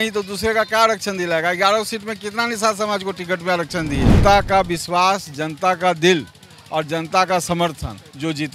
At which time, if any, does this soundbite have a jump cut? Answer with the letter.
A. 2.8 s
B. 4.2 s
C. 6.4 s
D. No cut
B